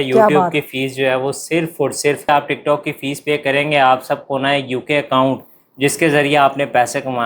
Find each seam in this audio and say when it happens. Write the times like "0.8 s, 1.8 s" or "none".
2.3 s

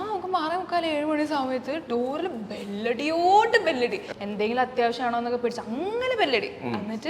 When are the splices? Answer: 4.1 s

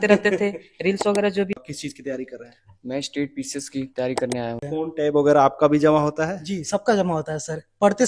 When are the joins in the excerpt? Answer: 1.5 s, 4.6 s

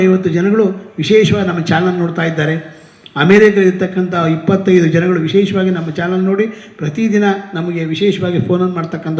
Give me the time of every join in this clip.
none

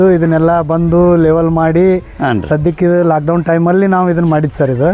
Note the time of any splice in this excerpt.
none

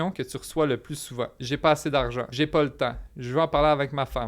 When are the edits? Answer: 1.4 s, 2.2 s

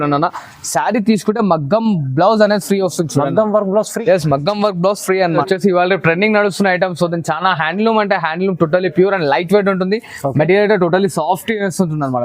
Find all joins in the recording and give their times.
5.3 s

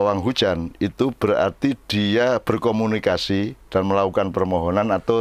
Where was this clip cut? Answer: none

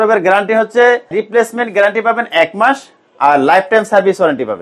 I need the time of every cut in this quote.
1.2 s

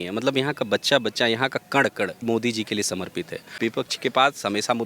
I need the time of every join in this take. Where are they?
2.2 s, 3.5 s

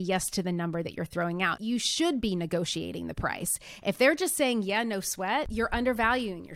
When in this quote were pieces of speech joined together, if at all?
1.6 s, 5.5 s

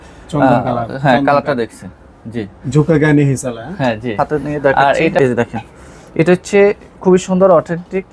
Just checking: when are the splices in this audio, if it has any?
5.2 s

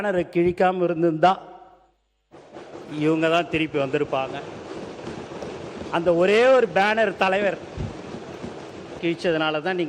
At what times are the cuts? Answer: 9.0 s

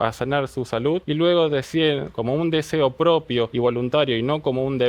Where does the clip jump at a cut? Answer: 1.0 s, 3.5 s

